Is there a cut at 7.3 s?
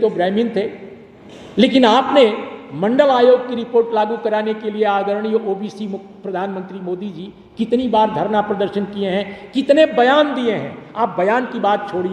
no; 0 cuts

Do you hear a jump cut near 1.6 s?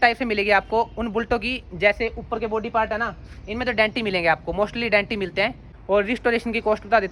no; 1 cut; at 5.7 s

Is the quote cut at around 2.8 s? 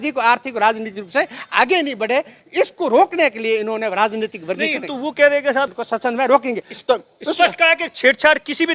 no; 1 cut; at 5.8 s

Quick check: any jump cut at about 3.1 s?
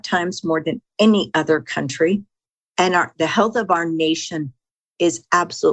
yes; 1 cut; at 3.1 s

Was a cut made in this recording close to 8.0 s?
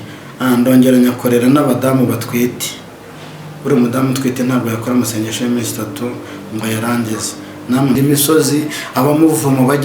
yes; 1 cut; at 8.0 s

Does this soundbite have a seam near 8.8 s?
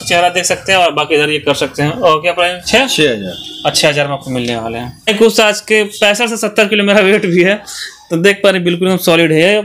no; 2 cuts; at 2.6 s, 5.1 s

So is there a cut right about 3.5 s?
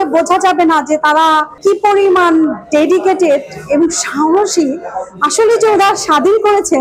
no; 0 cuts

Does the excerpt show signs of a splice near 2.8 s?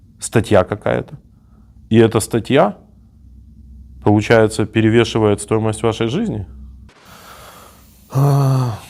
no; 1 cut; at 7.0 s

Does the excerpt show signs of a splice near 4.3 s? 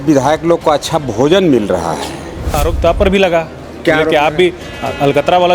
no; 1 cut; at 2.6 s

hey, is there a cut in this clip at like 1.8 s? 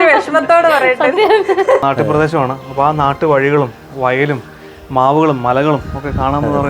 yes; 1 cut; at 1.8 s

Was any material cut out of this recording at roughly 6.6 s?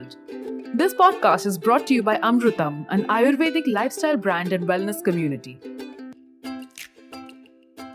no; 1 cut; at 5.4 s

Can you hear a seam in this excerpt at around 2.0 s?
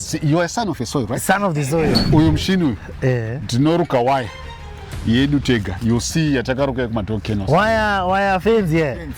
yes; 1 cut; at 2.0 s

